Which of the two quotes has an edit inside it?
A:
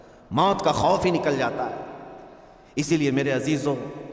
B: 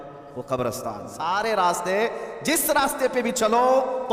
B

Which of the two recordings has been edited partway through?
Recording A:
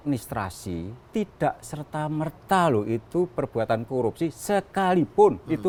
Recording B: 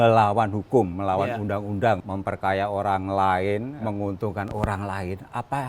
B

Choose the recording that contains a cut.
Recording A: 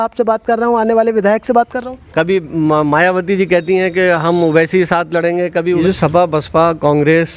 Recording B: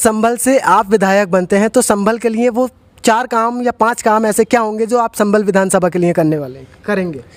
A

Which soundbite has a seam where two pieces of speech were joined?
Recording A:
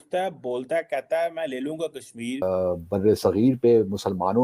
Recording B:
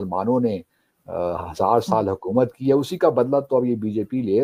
A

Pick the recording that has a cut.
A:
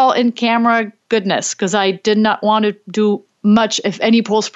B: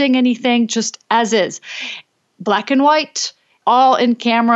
A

